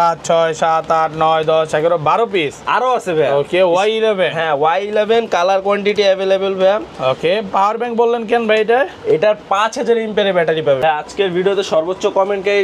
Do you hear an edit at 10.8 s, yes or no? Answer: yes